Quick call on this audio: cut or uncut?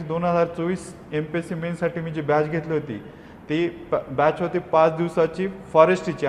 uncut